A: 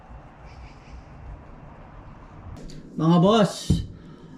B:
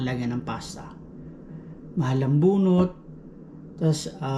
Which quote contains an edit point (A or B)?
A